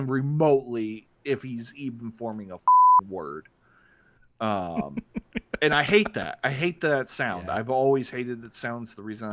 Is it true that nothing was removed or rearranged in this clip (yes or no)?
yes